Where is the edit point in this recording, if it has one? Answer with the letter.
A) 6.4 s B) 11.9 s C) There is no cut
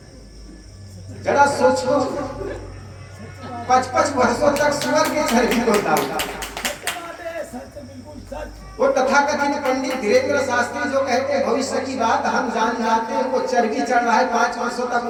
C